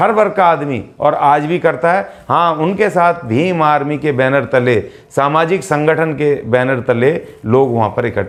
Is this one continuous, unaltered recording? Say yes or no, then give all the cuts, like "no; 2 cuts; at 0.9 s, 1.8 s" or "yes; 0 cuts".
yes; 0 cuts